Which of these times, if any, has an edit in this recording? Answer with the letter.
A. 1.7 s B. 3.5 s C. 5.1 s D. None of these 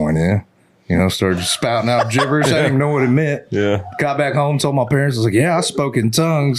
D